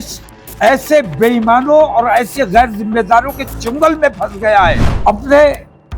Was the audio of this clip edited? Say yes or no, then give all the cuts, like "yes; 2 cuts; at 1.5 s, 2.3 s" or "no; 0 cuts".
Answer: yes; 1 cut; at 4.8 s